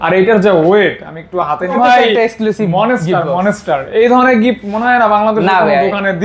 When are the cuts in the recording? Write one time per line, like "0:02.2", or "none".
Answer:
0:01.7

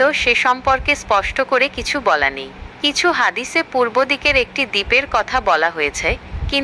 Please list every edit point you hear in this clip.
none

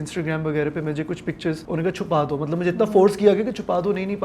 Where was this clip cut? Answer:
0:01.6

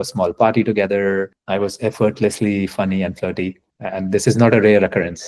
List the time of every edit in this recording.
0:01.4
0:03.7

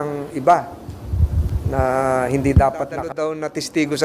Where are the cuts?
0:03.1

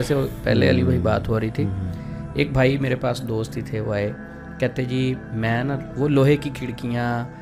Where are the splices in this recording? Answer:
none

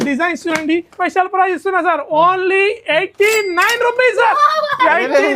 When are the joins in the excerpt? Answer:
0:01.0

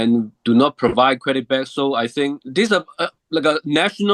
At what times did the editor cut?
0:02.4

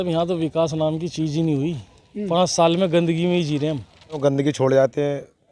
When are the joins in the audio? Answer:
0:04.2

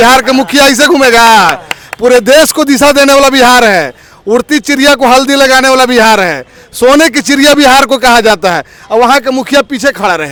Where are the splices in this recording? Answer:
none

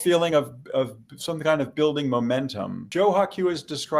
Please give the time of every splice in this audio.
0:02.9

